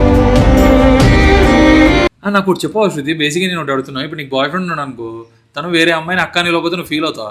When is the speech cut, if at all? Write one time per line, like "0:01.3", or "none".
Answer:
0:02.2